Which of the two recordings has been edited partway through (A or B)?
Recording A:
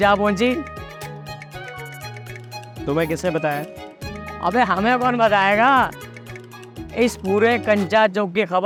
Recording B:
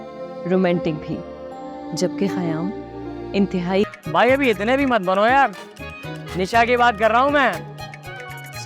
B